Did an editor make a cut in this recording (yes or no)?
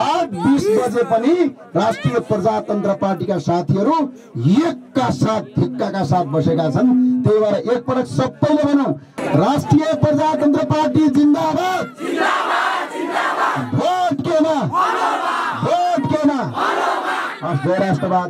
yes